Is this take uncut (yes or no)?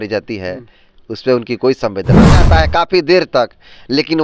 no